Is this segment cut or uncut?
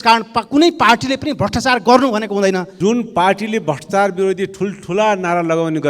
cut